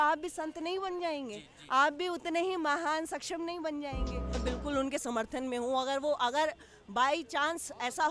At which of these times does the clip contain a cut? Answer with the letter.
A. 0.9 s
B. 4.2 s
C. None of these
B